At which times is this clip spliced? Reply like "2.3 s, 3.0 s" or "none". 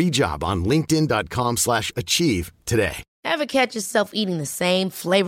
3.1 s